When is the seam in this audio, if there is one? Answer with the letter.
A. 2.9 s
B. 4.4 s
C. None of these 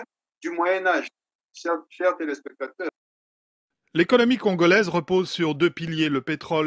A